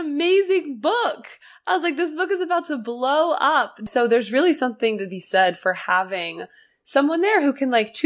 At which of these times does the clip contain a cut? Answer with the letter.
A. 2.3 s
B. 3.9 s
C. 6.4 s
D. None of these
B